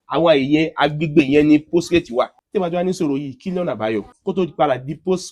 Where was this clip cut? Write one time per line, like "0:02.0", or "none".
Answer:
0:02.4
0:04.1

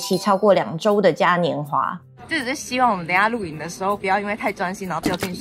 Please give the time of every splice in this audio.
0:02.0

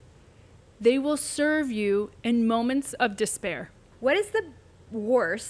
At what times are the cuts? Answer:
0:03.8

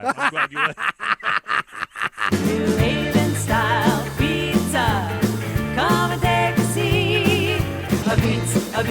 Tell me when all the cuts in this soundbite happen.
0:02.3

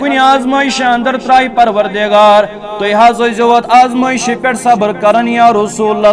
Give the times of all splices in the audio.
none

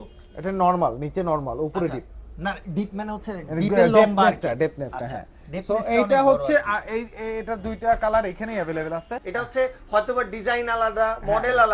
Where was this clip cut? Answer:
0:09.2

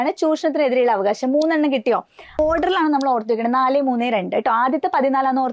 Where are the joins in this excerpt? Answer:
0:02.4

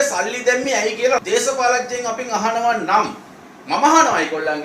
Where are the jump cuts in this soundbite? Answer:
0:01.2

